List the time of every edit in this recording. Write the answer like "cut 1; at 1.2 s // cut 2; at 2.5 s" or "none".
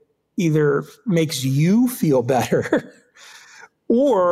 none